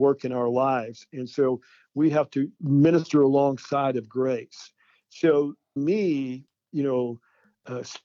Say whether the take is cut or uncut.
cut